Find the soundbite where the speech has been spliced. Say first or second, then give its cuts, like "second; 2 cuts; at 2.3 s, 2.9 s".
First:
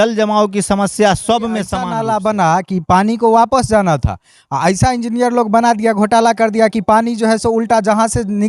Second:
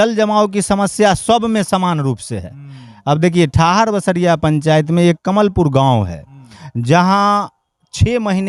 first; 1 cut; at 1.8 s